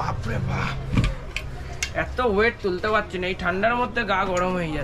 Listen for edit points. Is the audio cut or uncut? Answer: uncut